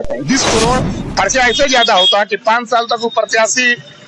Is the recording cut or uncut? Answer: cut